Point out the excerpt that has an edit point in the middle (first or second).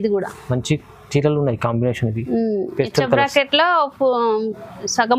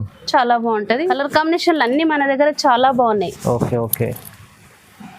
second